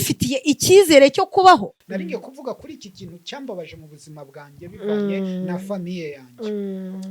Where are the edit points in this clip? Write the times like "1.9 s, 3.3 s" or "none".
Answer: 1.8 s

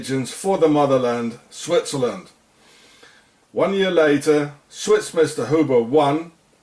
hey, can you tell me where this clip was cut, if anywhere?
3.2 s

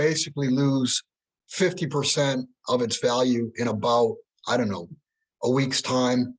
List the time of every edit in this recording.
none

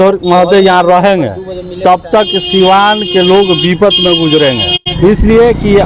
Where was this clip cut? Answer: 4.8 s

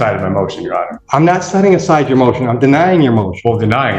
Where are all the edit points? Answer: 1.0 s

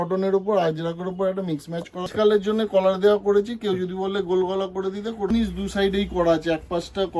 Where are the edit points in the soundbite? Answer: 2.1 s, 5.3 s

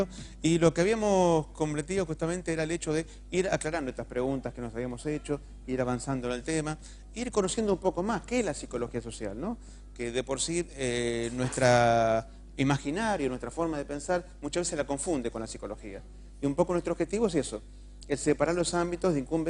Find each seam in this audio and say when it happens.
5.9 s

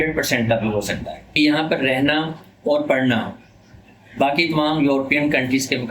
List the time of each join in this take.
1.2 s

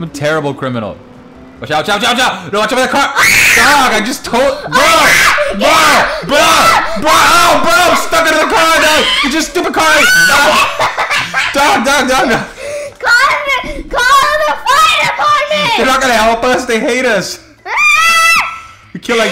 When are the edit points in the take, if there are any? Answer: none

